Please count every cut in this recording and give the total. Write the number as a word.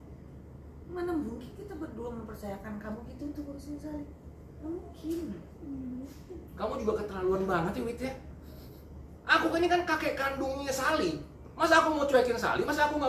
zero